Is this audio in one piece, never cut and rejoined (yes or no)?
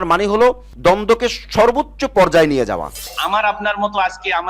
no